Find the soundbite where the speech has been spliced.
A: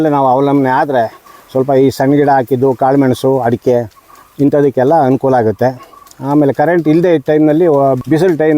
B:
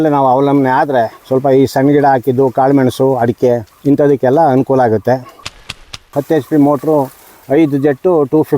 B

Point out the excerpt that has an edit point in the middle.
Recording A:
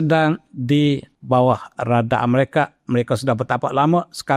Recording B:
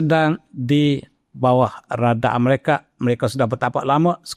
A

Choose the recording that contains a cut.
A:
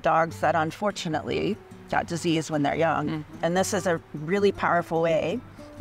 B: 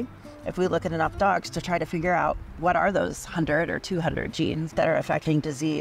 B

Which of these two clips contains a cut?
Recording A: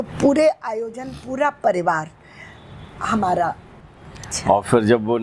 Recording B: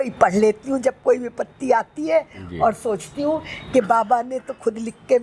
A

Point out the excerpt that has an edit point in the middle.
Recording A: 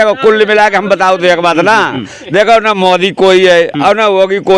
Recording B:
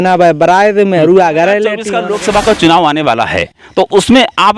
B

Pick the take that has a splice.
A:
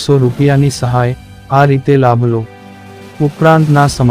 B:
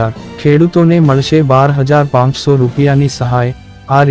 A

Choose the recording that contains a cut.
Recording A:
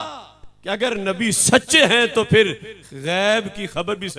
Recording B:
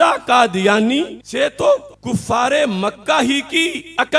B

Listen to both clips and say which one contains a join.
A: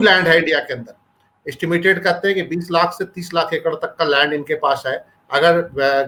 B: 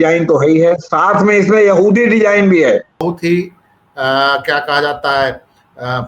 B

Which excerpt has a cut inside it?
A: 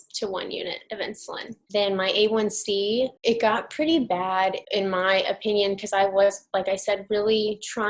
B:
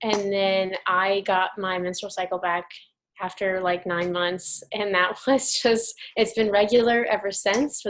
A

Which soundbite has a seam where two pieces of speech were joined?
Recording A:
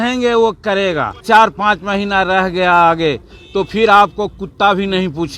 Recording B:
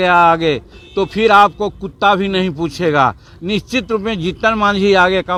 A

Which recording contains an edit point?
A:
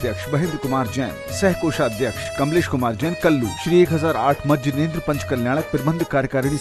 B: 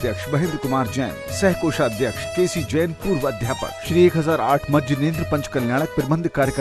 B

